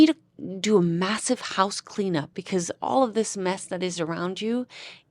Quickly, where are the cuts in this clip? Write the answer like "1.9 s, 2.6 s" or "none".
2.4 s